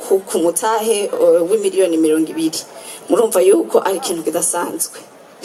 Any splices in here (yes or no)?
no